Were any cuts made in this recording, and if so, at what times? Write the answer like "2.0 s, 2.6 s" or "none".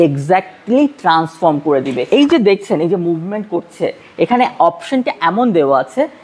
2.0 s